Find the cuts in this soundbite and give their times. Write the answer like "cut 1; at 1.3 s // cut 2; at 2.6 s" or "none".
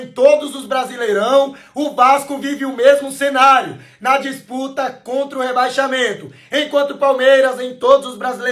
none